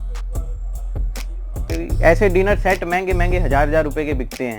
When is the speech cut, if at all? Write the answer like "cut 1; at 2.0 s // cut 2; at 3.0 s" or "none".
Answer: cut 1; at 1.7 s